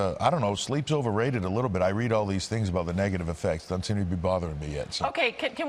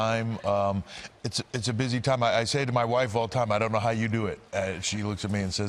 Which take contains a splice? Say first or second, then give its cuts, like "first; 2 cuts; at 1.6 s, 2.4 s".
first; 1 cut; at 1.6 s